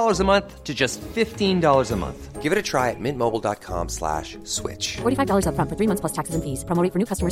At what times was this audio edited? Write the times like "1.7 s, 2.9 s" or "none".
none